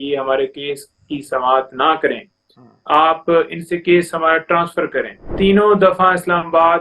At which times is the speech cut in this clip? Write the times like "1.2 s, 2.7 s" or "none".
5.2 s